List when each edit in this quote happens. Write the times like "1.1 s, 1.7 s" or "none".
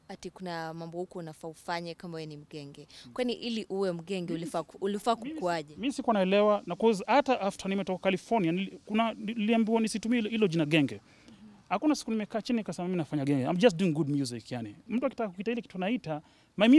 none